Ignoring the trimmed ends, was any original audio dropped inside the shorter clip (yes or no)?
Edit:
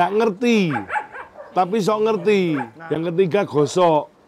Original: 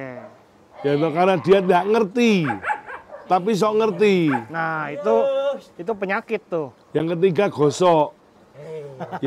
yes